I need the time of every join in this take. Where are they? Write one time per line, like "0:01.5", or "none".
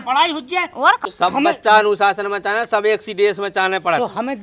0:01.0